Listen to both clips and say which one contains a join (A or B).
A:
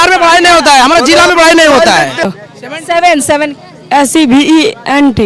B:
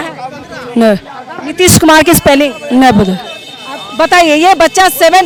A